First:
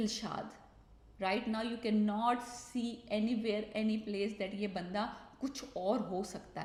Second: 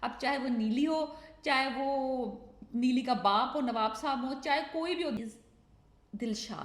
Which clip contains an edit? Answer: second; 1 cut; at 5.2 s

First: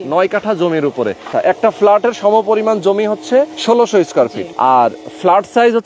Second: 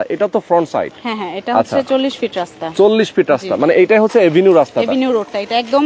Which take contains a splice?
first; 3 cuts; at 1.3 s, 3.6 s, 4.4 s

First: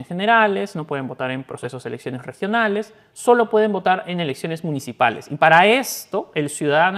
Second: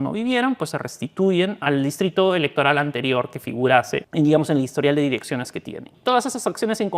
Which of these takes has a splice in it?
second; 3 cuts; at 1.6 s, 4.1 s, 5.9 s

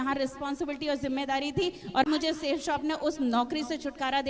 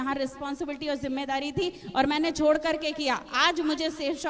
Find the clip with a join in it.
first; 1 cut; at 2.1 s

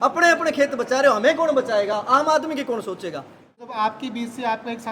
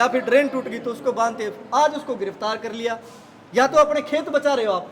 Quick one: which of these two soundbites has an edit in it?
first; 1 cut; at 3.7 s

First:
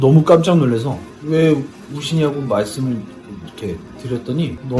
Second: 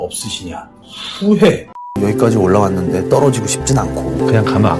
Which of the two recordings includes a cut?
second; 1 cut; at 1.9 s

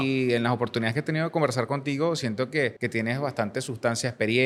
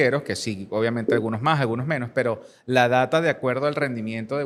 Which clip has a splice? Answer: first; 1 cut; at 2.8 s

